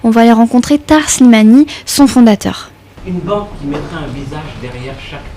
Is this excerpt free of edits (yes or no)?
yes